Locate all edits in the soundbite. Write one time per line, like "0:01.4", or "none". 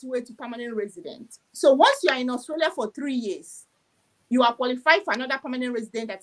none